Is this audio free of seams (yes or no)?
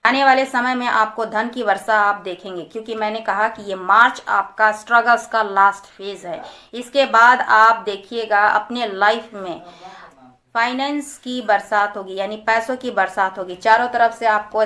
yes